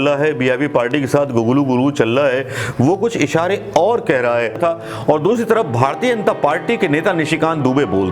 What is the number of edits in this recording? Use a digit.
1